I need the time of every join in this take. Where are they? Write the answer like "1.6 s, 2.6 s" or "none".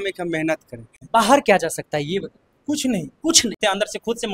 1.0 s, 3.6 s